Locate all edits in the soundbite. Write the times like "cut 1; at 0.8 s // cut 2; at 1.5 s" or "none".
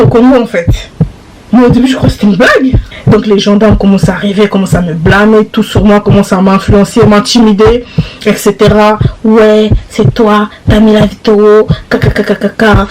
cut 1; at 2.9 s